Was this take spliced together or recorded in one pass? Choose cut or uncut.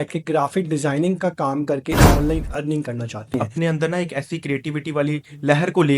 cut